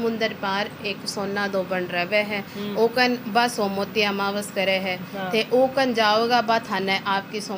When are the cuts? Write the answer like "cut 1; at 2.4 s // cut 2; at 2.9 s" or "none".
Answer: none